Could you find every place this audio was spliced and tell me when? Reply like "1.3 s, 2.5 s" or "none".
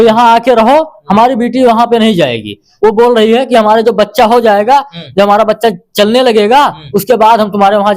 2.7 s